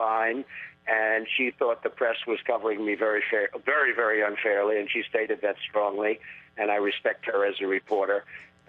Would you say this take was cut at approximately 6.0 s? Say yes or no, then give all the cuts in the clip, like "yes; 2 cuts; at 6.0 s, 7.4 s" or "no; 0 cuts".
yes; 1 cut; at 6.0 s